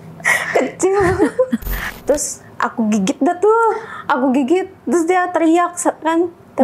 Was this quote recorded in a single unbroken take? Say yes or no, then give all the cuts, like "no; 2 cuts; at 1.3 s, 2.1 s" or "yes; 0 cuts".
no; 1 cut; at 1.8 s